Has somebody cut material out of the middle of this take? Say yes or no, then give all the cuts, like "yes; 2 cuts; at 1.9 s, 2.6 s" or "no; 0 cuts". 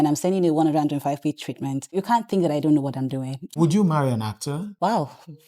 yes; 3 cuts; at 1.9 s, 3.5 s, 4.7 s